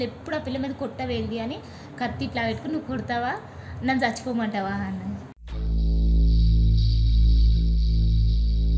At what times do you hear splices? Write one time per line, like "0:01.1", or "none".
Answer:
none